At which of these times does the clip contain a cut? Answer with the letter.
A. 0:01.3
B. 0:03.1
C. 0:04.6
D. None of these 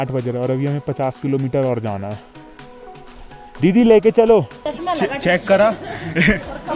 C